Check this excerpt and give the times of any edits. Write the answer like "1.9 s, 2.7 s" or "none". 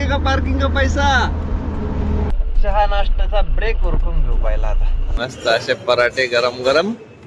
2.3 s